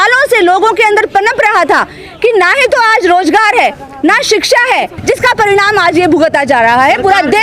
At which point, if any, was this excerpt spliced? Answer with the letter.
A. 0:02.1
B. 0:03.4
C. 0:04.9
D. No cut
C